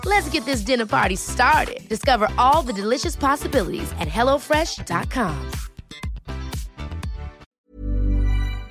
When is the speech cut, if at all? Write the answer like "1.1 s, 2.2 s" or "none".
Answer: 7.4 s